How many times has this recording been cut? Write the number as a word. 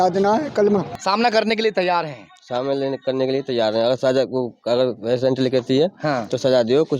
one